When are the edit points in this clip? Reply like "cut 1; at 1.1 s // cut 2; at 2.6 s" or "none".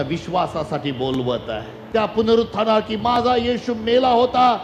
cut 1; at 1.8 s